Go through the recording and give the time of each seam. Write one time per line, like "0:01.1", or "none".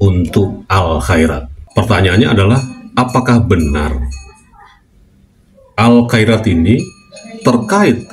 0:01.5

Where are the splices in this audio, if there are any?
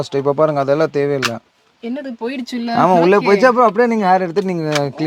none

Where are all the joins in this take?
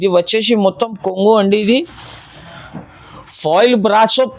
none

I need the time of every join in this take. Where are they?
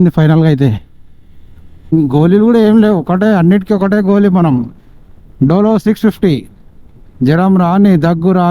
0:01.7

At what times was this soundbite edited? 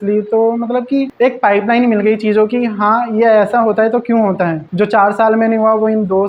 0:04.6

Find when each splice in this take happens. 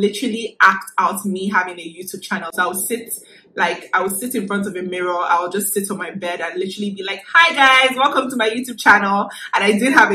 none

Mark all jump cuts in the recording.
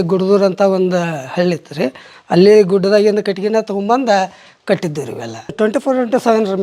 0:05.5

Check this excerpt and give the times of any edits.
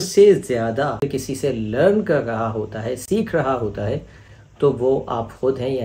0:01.1

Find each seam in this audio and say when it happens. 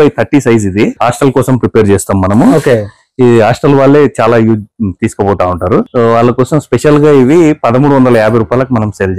0:01.0
0:05.8

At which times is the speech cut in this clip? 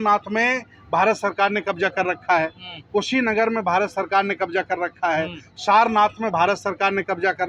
none

